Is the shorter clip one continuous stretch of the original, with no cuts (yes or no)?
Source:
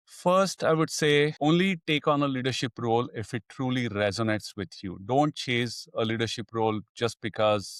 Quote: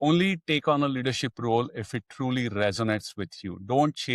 yes